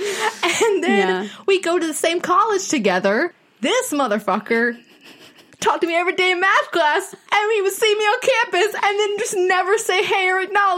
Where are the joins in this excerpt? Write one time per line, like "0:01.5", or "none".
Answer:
0:03.4